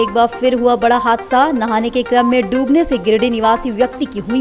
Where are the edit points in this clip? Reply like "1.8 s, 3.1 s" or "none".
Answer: none

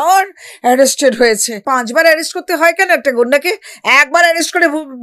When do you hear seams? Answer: 1.6 s

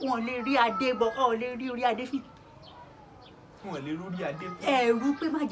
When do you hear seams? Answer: none

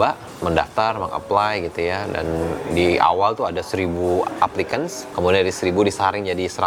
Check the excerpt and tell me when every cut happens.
none

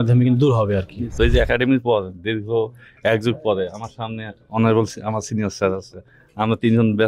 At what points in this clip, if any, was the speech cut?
1.1 s

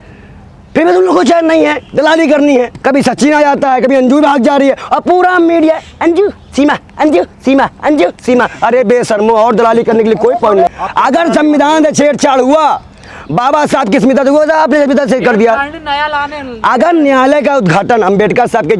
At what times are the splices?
2.7 s, 10.7 s

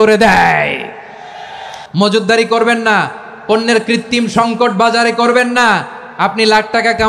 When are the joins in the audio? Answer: 1.7 s

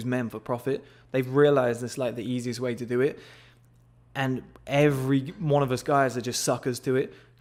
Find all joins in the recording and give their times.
none

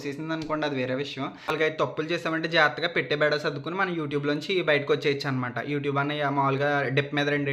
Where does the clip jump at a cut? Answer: 1.5 s

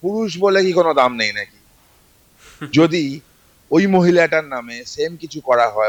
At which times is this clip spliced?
none

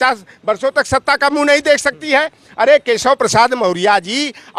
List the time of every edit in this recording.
none

